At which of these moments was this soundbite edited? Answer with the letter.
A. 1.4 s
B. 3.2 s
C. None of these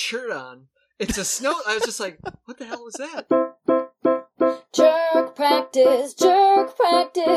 B